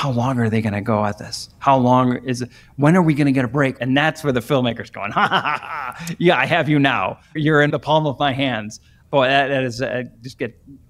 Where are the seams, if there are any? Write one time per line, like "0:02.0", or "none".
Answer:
0:03.8
0:07.5

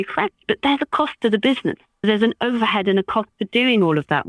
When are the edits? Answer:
0:02.0

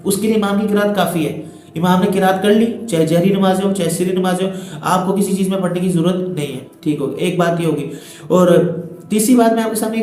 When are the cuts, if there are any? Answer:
none

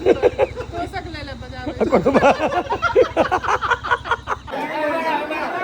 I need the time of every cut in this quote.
0:04.4

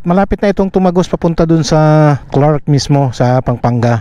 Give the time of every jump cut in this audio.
0:02.3

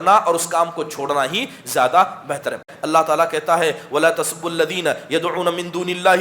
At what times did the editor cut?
0:02.7

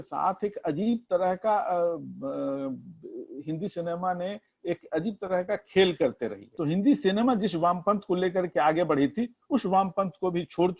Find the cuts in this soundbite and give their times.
0:06.5

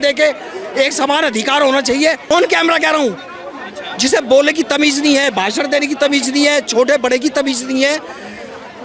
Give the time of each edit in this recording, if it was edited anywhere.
0:02.3

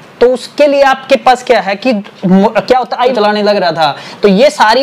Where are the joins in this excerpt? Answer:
0:03.1

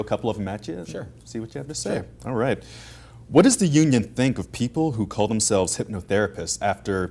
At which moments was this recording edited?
none

